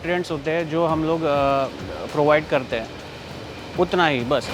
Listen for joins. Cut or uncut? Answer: uncut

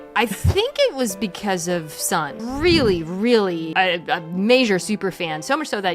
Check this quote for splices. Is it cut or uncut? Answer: cut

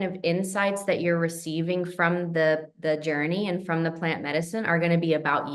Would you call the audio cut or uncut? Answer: uncut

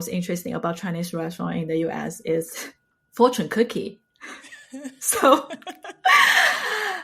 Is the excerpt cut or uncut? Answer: uncut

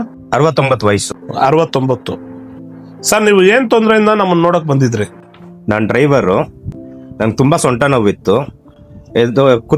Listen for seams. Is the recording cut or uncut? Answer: uncut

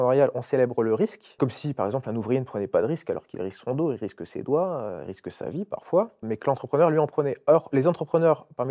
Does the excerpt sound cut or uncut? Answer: cut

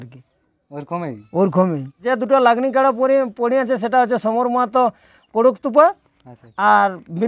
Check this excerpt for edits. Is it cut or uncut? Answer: cut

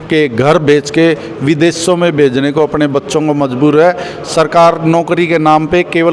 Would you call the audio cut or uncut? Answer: uncut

